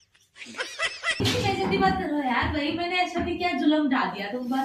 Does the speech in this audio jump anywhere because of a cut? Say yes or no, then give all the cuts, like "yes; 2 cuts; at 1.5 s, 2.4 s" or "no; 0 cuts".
yes; 1 cut; at 1.2 s